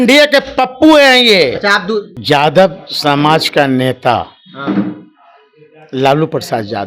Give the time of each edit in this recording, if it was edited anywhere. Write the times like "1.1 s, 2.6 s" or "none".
2.1 s